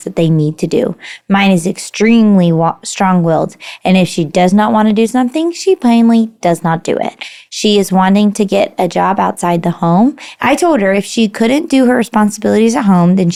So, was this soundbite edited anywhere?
no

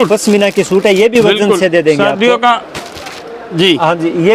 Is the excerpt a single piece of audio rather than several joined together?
yes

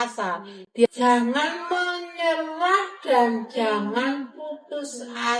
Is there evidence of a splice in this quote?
no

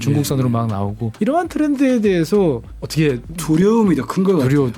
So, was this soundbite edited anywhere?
yes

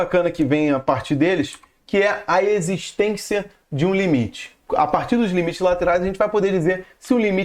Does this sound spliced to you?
yes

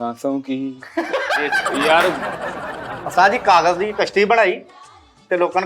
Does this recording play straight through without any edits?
no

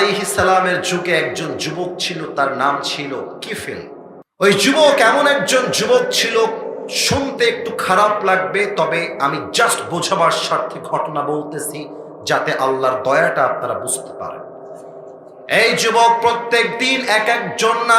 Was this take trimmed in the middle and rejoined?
yes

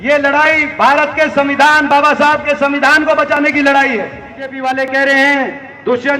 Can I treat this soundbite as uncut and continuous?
no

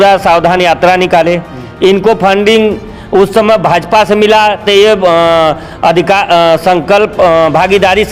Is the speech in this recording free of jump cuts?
yes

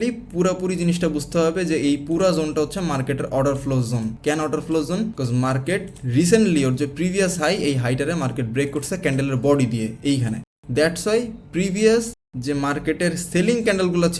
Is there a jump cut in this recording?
no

